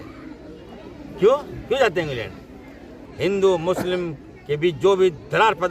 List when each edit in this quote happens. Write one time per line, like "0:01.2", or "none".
0:03.0